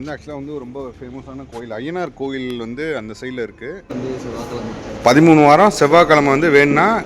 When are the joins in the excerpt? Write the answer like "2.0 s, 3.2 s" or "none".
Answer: 3.9 s